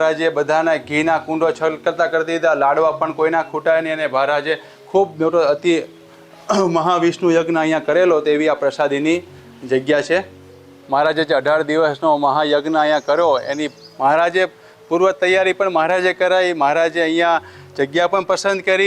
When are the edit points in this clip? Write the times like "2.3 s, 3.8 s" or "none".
none

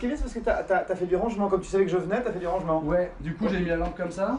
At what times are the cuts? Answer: 3.3 s

